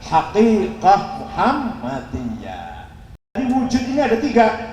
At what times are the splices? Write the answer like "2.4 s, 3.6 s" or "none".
3.4 s